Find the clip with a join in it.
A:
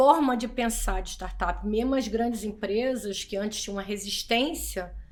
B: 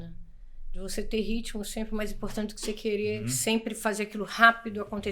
B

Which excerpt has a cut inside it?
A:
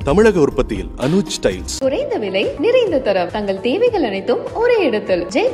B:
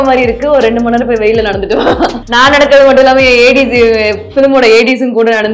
B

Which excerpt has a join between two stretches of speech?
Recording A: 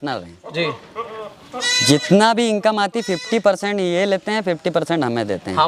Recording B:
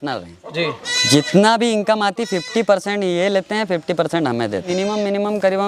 B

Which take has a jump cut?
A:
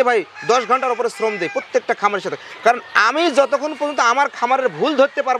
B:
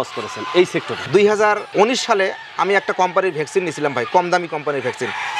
B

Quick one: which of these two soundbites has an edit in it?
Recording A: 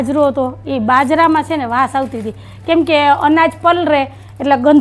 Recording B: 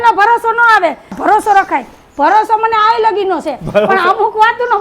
B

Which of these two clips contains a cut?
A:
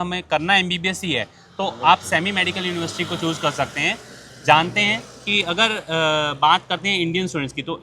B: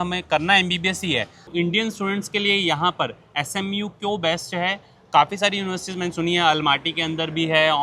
B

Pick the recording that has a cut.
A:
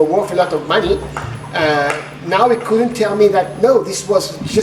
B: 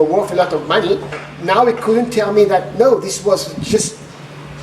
B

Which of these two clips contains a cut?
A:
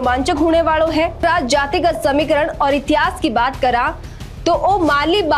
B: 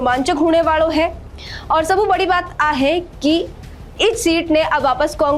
A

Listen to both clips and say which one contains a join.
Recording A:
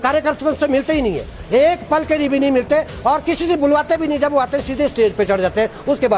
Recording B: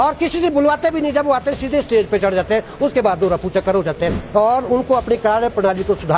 B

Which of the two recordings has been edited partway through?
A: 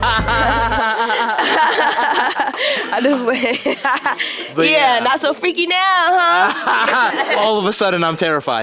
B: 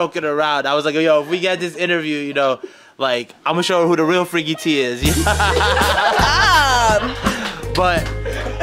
A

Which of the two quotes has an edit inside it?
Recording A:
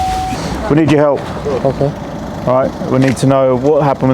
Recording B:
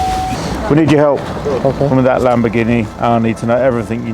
B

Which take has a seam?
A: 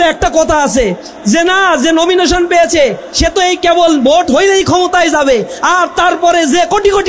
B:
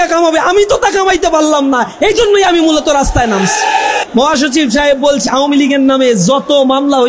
B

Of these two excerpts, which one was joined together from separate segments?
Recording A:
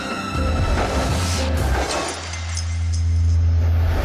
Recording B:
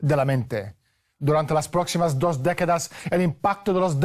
B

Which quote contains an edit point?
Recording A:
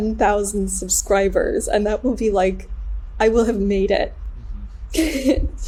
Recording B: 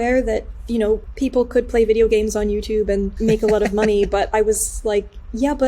B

